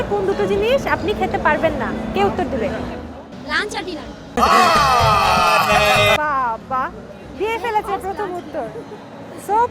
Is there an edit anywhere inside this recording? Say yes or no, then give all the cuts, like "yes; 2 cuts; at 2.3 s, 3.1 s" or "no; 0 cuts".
no; 0 cuts